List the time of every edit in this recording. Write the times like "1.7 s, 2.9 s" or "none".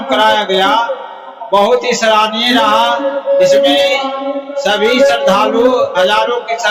none